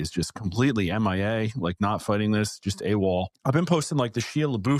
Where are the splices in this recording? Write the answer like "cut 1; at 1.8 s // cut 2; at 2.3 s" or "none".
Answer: cut 1; at 3.3 s